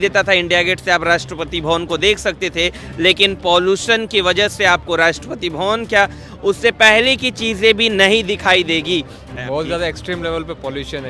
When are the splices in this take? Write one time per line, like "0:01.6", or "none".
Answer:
0:09.3